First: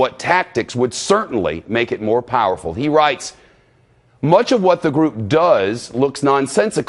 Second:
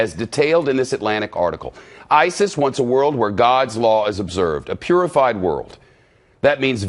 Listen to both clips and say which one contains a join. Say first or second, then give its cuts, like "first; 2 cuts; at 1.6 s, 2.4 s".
first; 1 cut; at 5.2 s